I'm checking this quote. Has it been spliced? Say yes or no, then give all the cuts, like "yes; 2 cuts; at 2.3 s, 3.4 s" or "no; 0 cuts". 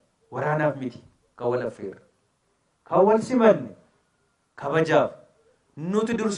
no; 0 cuts